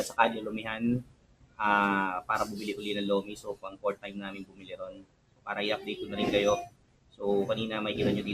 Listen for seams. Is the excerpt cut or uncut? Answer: uncut